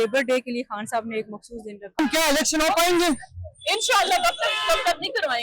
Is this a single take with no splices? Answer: no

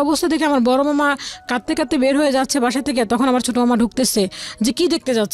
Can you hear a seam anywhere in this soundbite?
no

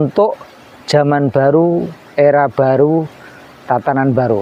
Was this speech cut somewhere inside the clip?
no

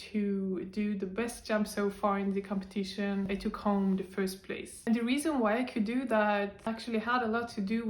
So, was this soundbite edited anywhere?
yes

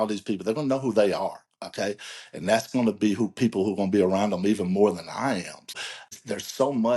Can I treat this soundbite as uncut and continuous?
no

